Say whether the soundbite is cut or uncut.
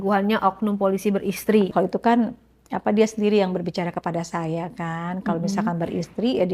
cut